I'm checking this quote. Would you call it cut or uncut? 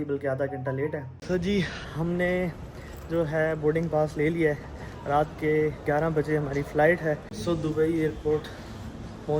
cut